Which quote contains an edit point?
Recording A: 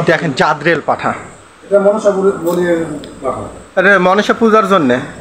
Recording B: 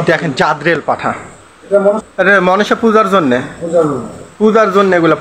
B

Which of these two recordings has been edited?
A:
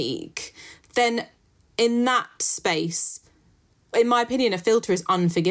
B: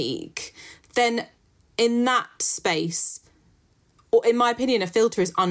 A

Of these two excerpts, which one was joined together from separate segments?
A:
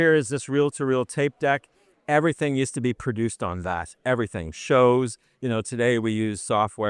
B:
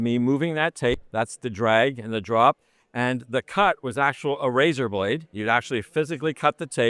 A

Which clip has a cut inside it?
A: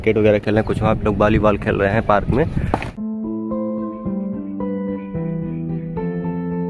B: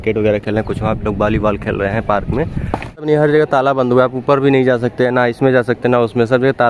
B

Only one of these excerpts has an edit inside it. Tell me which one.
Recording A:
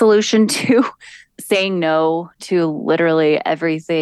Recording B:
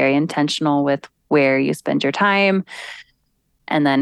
A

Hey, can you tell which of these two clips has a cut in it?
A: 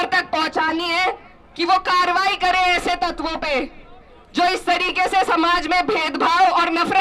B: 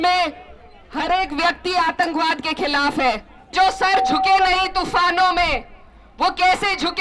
B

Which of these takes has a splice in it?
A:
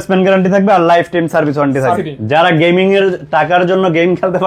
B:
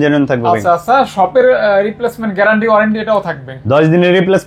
A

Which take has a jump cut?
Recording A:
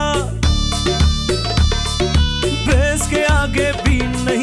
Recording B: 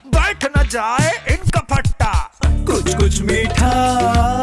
B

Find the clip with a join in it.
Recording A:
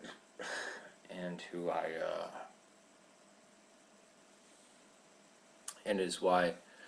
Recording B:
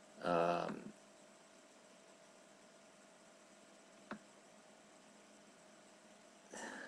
B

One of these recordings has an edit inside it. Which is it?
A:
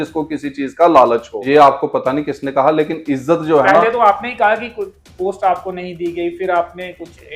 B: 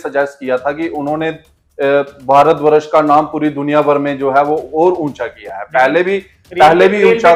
A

